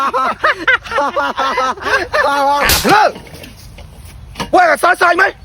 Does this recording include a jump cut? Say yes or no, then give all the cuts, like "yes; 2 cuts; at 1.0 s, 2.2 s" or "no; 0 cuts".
no; 0 cuts